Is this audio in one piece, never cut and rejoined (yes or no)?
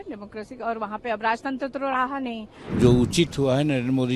no